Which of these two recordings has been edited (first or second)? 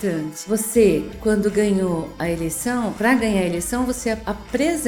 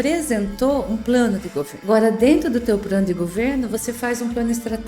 second